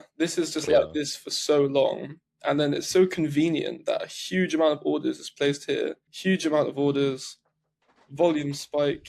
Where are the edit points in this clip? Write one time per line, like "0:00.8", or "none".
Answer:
0:06.1